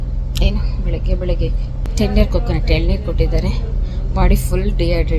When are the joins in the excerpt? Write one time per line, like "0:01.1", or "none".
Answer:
0:01.8

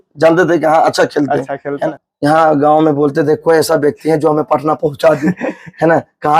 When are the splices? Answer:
0:01.9

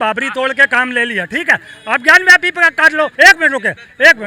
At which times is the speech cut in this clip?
0:03.1

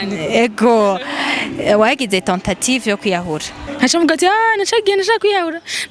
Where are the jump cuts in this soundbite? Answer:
0:03.6

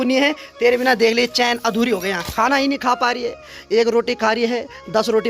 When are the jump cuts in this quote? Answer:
0:02.2

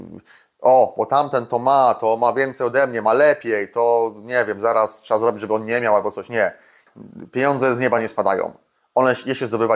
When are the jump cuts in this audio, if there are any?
0:06.9

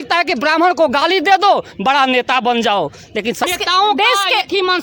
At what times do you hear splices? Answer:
0:03.4

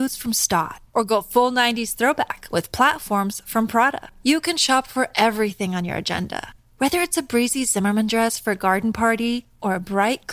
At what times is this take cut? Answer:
none

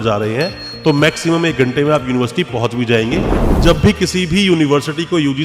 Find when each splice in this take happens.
0:03.4

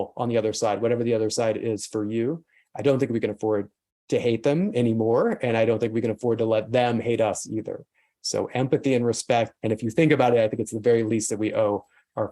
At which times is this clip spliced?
0:09.5

